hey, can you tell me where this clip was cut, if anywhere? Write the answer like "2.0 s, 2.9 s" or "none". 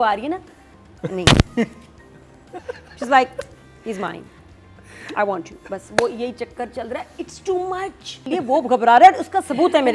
2.7 s, 8.2 s